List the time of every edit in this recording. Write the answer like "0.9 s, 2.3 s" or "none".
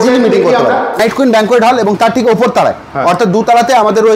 1.0 s